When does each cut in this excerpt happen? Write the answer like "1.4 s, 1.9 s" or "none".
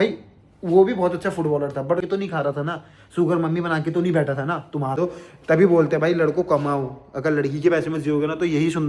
2.0 s, 4.9 s